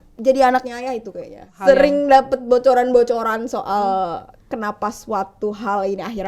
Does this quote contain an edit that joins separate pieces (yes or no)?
yes